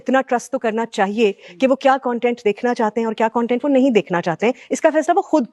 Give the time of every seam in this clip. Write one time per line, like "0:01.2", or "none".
none